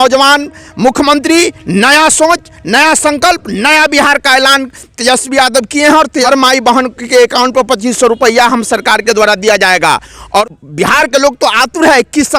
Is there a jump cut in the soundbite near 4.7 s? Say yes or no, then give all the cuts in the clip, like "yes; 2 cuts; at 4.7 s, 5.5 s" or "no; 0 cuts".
no; 2 cuts; at 6.2 s, 10.4 s